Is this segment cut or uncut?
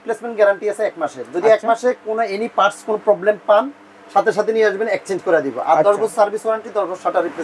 uncut